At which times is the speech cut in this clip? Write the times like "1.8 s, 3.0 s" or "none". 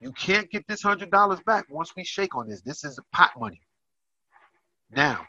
none